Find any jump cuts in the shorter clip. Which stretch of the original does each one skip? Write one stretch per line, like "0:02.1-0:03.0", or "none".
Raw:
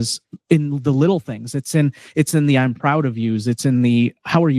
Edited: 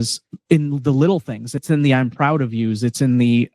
0:01.7-0:02.3